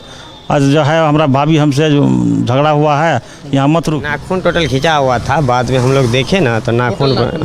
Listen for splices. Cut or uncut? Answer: cut